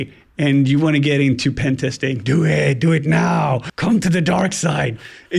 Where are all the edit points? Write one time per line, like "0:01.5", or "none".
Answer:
0:03.7